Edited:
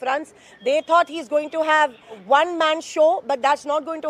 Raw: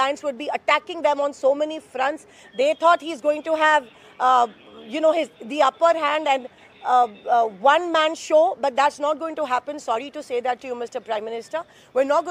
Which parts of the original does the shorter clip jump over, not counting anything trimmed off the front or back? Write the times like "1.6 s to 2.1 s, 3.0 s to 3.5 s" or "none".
4.1 s to 7.5 s